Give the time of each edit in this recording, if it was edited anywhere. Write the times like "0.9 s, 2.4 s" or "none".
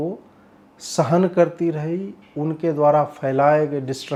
none